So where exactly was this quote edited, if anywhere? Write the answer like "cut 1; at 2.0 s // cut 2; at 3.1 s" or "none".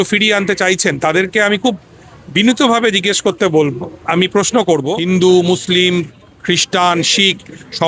cut 1; at 4.9 s